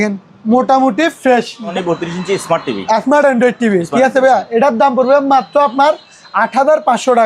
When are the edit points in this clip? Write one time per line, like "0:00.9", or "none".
0:01.7